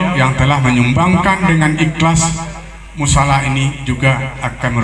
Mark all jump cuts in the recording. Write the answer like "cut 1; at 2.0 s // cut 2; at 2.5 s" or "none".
none